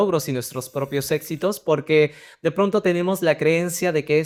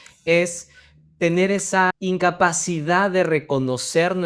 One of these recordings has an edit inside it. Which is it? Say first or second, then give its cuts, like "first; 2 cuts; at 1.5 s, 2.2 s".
second; 1 cut; at 1.9 s